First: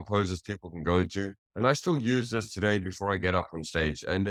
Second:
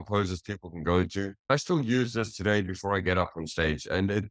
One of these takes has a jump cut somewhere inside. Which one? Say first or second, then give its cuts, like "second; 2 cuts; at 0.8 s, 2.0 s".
second; 1 cut; at 1.5 s